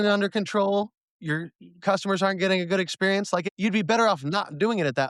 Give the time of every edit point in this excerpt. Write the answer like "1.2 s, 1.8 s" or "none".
3.5 s